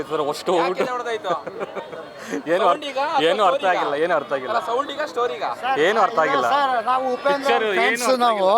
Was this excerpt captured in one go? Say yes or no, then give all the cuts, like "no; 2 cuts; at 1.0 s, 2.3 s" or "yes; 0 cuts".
yes; 0 cuts